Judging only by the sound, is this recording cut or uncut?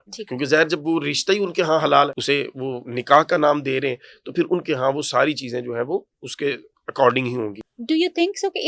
cut